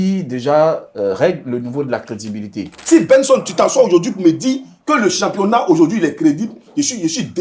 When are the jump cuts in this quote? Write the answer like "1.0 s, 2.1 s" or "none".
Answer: 2.7 s